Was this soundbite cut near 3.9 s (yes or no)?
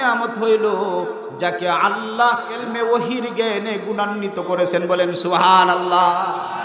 no